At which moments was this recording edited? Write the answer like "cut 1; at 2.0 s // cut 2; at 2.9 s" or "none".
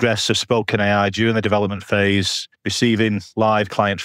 none